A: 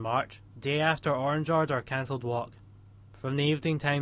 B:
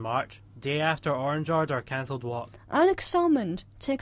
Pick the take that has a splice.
B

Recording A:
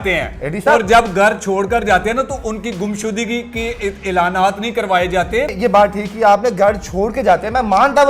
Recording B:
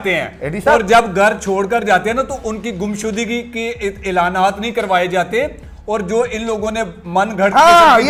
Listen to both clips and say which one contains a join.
A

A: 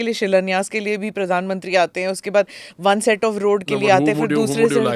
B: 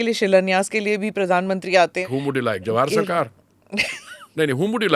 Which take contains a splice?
B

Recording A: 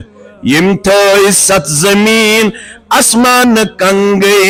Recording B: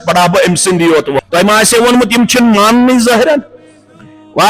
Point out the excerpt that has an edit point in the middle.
B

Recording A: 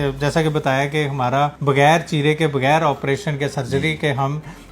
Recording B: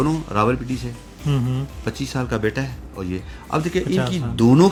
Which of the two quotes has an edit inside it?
A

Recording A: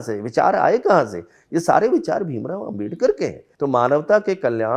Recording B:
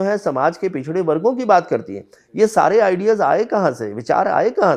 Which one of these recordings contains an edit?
A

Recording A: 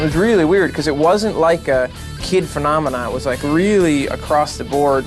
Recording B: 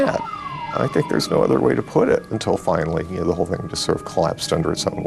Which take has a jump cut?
B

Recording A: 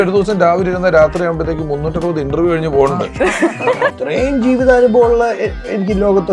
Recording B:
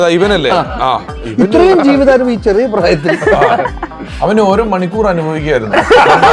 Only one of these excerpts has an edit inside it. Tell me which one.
A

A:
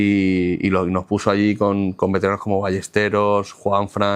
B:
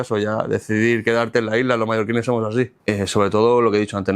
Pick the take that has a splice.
B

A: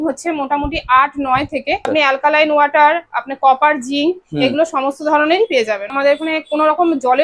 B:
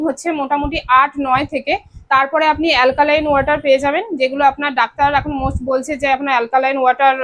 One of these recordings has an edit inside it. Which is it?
A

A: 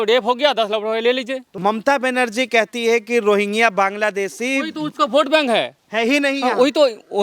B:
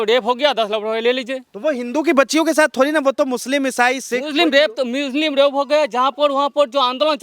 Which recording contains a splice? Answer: A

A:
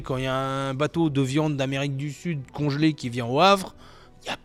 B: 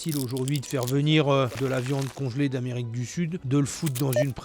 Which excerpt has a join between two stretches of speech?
B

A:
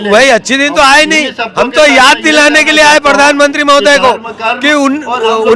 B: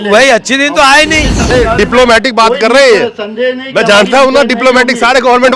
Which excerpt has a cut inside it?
B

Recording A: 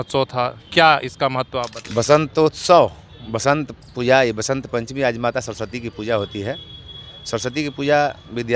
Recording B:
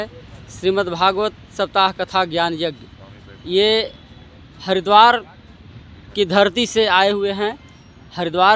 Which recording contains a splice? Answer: A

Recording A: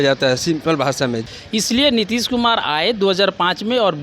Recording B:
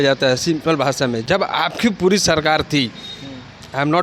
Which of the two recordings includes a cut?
A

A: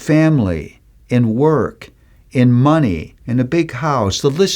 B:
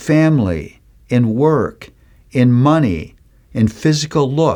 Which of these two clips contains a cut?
A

